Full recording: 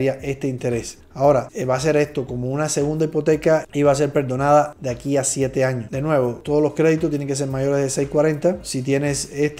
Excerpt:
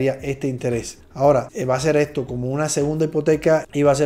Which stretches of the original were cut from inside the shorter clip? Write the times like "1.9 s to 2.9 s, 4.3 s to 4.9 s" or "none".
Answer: none